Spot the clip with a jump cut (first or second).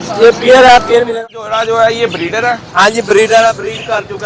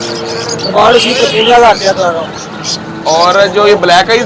first